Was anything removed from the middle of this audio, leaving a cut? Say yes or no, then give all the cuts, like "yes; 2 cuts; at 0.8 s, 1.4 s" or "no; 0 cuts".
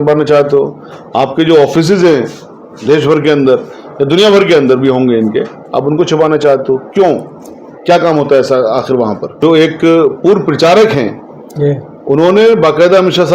yes; 1 cut; at 9.3 s